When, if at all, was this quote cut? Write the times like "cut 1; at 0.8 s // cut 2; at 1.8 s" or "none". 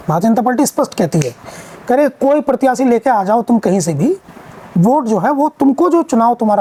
none